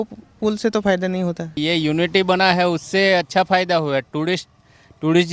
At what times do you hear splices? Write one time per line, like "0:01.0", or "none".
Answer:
0:01.6